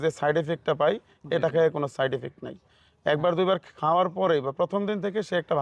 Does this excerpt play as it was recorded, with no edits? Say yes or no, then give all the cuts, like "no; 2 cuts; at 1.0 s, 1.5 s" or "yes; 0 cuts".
yes; 0 cuts